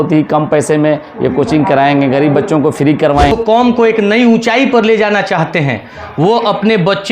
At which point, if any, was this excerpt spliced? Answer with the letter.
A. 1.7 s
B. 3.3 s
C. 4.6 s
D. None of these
B